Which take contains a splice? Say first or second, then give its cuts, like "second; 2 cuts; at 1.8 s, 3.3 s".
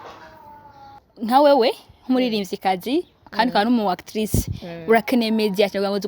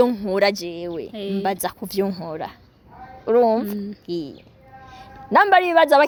first; 1 cut; at 1.1 s